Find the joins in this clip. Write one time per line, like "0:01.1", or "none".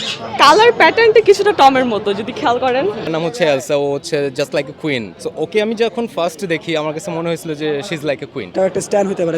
0:03.1
0:05.2
0:08.5